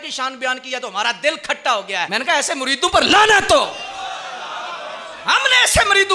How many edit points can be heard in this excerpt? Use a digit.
2